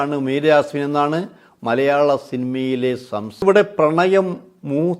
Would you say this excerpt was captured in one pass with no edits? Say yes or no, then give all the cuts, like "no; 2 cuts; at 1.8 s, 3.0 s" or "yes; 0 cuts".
no; 1 cut; at 3.4 s